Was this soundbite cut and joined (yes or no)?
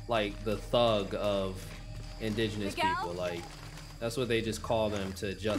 no